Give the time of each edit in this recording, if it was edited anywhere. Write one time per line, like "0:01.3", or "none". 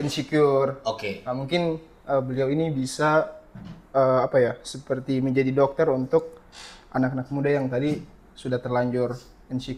none